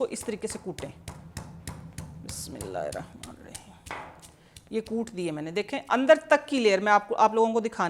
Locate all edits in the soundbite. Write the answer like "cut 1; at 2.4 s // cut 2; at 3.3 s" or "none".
none